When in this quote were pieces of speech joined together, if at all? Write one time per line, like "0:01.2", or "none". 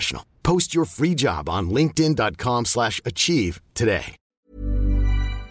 0:04.4

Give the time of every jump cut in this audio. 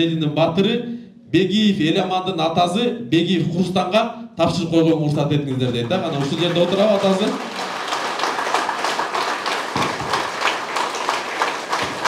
none

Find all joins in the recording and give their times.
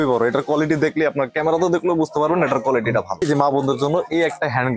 0:03.2

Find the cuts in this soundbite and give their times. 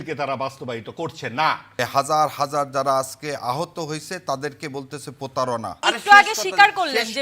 0:01.8
0:05.8

